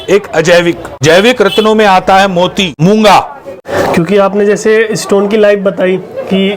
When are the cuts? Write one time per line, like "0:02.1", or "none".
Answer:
0:00.9
0:02.8
0:03.6